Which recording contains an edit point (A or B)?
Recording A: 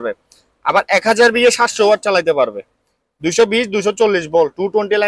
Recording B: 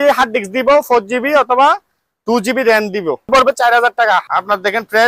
B